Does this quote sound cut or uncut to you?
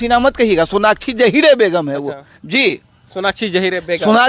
uncut